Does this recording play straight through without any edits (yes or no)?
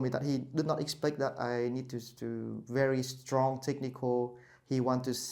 yes